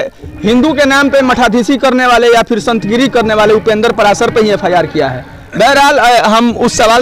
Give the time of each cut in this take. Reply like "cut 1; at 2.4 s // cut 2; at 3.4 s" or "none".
none